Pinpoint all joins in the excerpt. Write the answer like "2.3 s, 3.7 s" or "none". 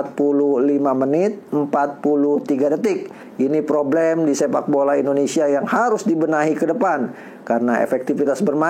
3.1 s